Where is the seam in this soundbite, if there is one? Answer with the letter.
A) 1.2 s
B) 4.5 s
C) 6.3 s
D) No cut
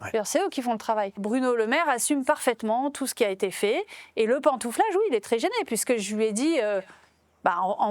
A